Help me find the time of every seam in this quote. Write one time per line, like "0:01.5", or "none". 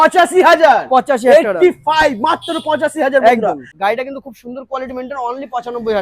0:03.7